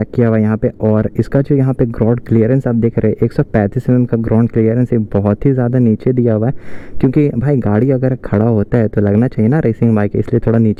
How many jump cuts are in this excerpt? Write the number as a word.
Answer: zero